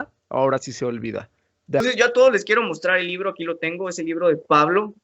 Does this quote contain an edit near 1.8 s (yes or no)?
yes